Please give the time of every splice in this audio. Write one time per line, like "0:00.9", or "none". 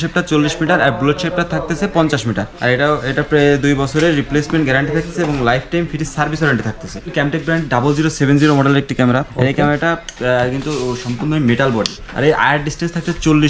0:02.5
0:07.1
0:09.3
0:12.0

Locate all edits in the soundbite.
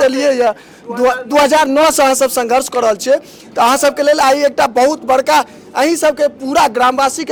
none

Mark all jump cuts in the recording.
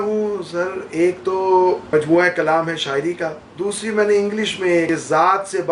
0:01.8
0:03.4
0:04.9

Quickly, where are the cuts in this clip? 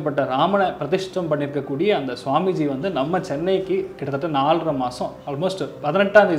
none

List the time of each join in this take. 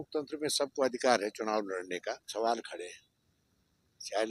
0:02.3

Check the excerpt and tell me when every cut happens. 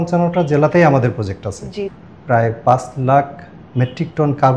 0:01.8

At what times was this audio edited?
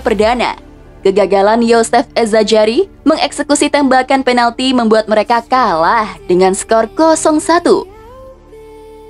0:07.9

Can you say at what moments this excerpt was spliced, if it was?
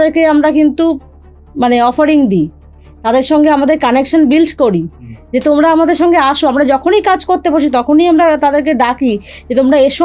none

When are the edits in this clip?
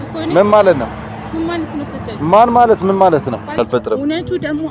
0:03.6

